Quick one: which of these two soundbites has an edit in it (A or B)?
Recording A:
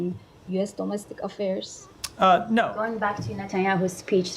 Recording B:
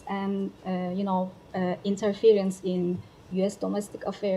A